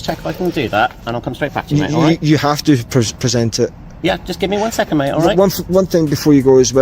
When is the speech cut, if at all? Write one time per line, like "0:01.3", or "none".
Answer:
0:04.1